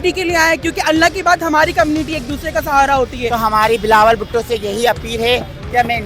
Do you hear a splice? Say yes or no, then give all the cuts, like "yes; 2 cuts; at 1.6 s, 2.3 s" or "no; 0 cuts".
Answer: yes; 1 cut; at 3.4 s